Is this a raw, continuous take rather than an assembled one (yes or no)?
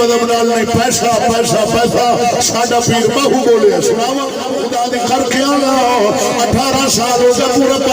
no